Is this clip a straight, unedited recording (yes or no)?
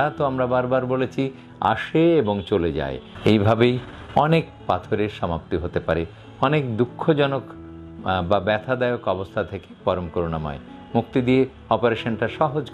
no